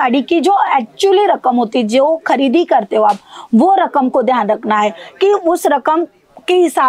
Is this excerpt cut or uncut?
uncut